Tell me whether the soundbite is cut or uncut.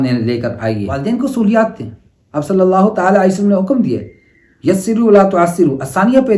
cut